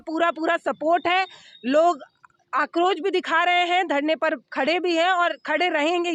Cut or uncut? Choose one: uncut